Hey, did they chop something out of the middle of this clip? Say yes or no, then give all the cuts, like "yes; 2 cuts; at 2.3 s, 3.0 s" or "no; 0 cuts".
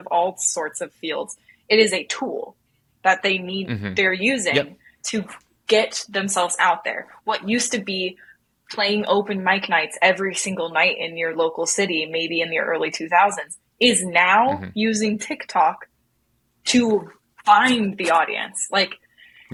no; 0 cuts